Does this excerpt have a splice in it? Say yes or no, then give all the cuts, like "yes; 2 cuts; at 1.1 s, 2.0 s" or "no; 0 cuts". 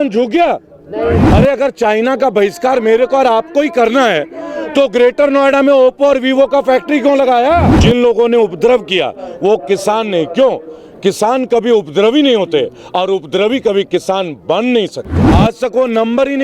yes; 3 cuts; at 1.2 s, 7.7 s, 15.1 s